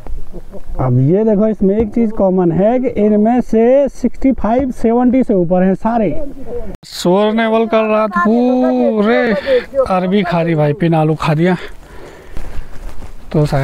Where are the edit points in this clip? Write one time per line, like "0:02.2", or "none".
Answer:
0:06.9
0:12.3